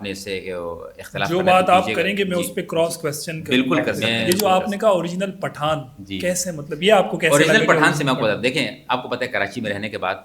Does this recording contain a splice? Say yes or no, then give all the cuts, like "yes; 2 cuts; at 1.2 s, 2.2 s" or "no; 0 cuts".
yes; 1 cut; at 4.0 s